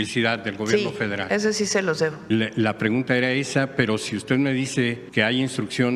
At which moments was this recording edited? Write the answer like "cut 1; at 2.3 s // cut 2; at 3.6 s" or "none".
cut 1; at 2.2 s // cut 2; at 5.0 s